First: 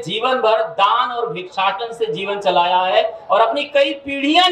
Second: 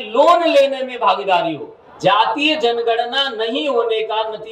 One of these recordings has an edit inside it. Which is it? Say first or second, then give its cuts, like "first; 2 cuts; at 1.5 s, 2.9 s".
second; 1 cut; at 1.8 s